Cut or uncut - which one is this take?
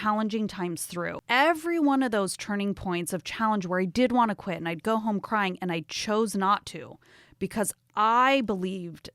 cut